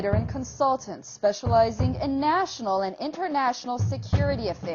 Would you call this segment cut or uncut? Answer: cut